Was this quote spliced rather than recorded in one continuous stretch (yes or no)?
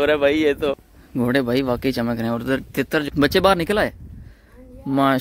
yes